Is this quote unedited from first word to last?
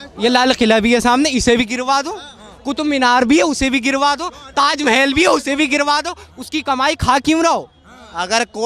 yes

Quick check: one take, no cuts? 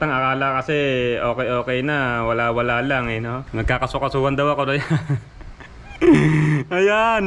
no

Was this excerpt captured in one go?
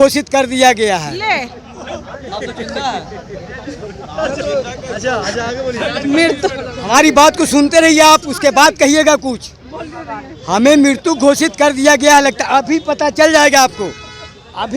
yes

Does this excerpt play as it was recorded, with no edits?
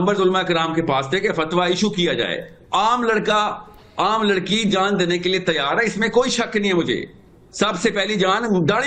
yes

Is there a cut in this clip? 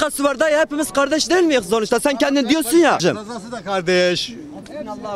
yes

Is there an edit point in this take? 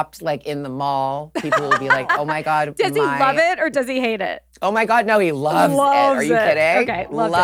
no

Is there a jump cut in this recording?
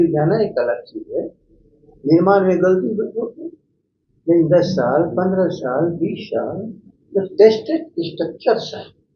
no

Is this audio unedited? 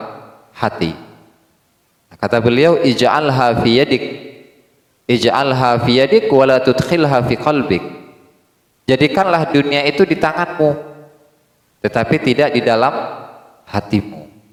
yes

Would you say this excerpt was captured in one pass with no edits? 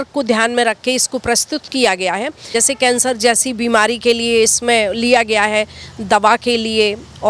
no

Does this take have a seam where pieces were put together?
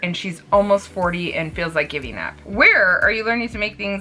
yes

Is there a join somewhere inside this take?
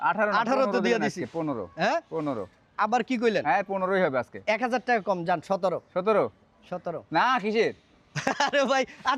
no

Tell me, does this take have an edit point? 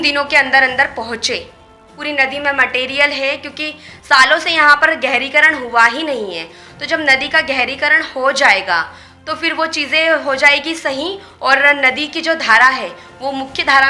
yes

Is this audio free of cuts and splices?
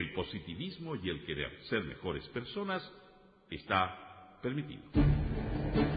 no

